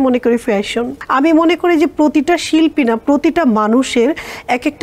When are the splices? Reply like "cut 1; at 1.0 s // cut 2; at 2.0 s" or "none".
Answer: cut 1; at 1.0 s